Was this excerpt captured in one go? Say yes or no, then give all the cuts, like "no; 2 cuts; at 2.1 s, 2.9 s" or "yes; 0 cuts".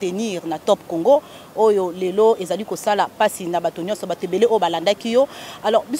yes; 0 cuts